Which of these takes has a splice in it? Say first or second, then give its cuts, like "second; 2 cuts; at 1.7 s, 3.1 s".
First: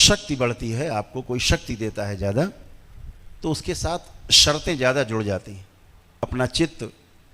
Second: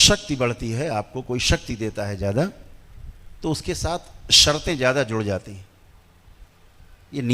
first; 1 cut; at 6.2 s